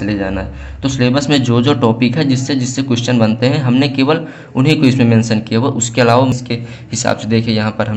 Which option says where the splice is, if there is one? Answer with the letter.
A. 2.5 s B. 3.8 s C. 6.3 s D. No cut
C